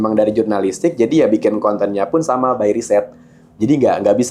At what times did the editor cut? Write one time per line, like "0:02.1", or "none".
none